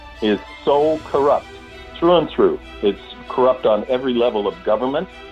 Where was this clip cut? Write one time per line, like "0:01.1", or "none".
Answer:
none